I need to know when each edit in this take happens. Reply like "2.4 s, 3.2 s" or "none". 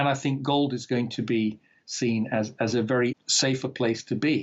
3.3 s